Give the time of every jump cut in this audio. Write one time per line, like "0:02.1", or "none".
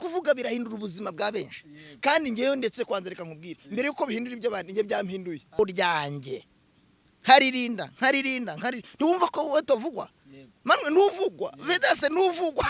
0:05.6